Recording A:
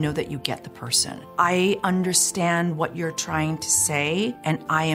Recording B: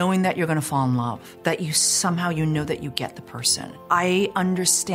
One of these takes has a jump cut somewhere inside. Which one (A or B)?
B